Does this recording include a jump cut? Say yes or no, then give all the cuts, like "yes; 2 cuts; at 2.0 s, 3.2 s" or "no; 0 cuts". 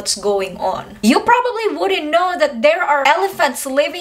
yes; 2 cuts; at 0.9 s, 3.0 s